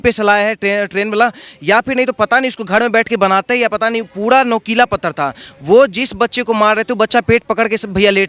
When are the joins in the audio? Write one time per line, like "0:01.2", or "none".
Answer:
none